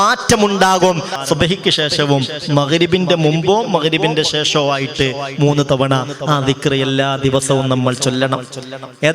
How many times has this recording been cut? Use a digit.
1